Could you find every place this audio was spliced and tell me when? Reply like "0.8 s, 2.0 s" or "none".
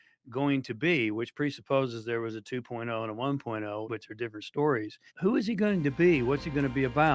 3.8 s, 5.1 s